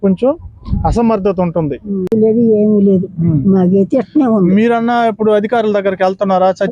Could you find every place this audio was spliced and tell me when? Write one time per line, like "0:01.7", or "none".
0:02.1

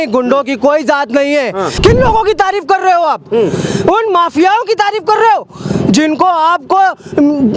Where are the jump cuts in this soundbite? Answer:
0:01.7

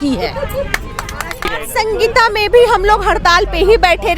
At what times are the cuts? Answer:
0:01.5

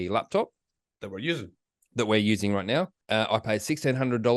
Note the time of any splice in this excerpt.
0:03.0

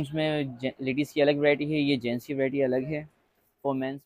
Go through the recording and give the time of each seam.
none

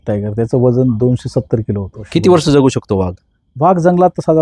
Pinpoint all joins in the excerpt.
0:02.0

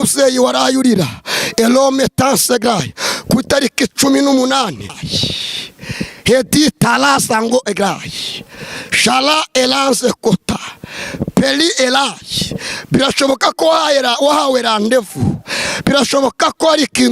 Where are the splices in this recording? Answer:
0:05.0

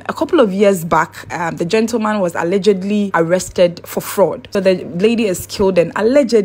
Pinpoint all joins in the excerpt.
0:04.4

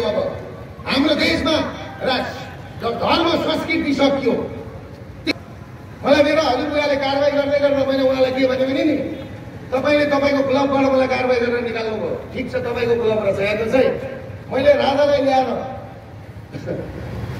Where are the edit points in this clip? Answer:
0:05.3

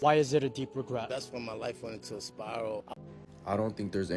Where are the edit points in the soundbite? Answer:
0:02.9

